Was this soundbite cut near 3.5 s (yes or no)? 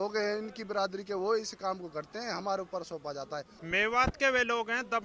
yes